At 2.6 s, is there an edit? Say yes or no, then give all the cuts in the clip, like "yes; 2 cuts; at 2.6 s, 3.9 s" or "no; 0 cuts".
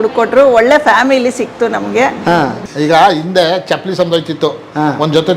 yes; 1 cut; at 2.6 s